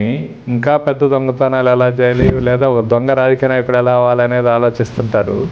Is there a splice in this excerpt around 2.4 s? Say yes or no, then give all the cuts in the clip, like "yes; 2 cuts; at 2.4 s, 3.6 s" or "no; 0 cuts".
no; 0 cuts